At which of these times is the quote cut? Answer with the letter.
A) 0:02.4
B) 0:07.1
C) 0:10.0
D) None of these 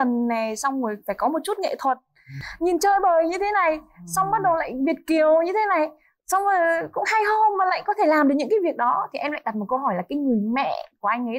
A